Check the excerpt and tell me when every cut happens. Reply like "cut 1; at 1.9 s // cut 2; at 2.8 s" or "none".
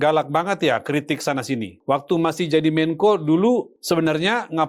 cut 1; at 1.7 s // cut 2; at 3.7 s